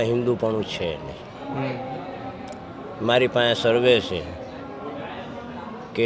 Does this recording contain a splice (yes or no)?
no